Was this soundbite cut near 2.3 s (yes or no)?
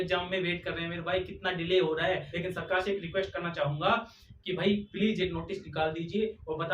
yes